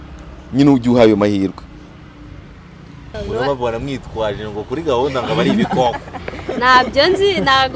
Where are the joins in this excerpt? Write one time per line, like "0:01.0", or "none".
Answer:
0:03.1

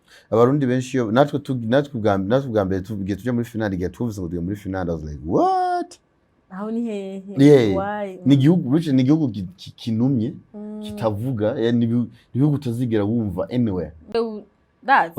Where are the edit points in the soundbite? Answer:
0:14.1

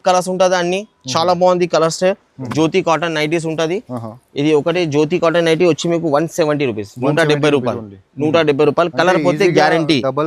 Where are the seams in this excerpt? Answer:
0:02.4

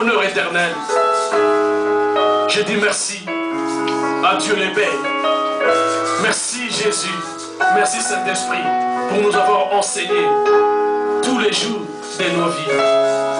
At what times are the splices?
none

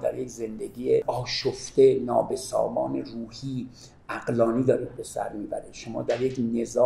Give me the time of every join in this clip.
0:01.0

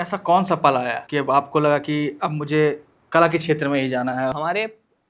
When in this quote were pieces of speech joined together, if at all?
0:01.0
0:04.3

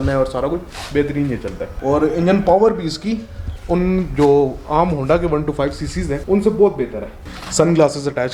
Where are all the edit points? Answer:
0:01.7
0:06.2
0:07.2

